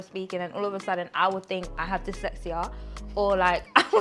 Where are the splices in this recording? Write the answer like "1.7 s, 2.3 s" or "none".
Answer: none